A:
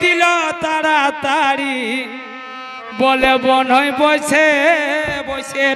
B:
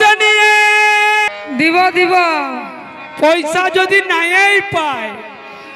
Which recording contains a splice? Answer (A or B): B